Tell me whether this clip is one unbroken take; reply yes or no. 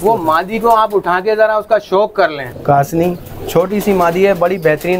no